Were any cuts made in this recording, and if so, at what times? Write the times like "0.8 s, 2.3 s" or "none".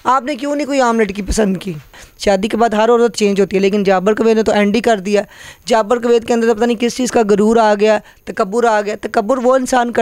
1.9 s